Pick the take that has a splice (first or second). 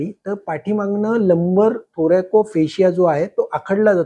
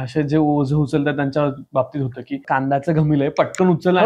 second